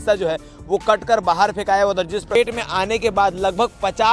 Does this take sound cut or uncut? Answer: cut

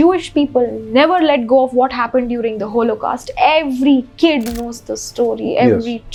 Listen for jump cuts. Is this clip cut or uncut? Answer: uncut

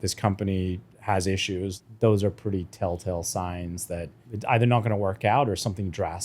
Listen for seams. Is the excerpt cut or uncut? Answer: cut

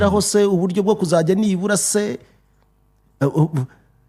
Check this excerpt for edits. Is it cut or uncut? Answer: uncut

